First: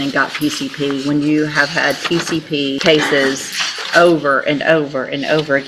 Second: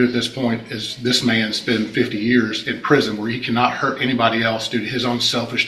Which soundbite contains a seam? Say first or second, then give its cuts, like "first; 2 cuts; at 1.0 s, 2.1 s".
first; 1 cut; at 2.8 s